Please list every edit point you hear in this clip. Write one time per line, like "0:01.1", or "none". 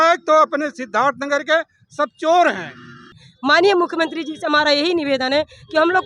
0:03.2